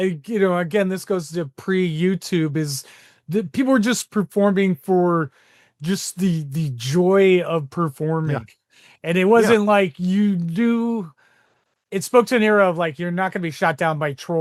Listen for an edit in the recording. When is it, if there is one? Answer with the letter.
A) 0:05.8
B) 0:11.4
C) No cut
C